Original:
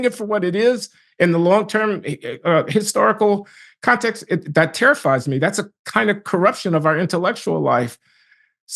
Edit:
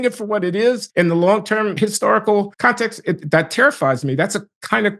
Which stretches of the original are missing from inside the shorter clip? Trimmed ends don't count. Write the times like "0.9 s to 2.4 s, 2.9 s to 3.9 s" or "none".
0.8 s to 1.1 s, 2.0 s to 2.7 s, 3.5 s to 3.8 s